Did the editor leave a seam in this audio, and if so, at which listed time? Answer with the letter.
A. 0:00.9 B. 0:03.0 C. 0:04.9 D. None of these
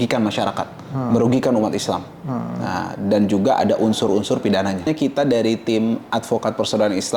C